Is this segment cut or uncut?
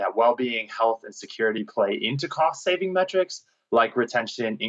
uncut